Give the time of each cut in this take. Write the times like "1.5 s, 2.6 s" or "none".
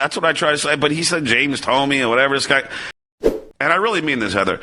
3.2 s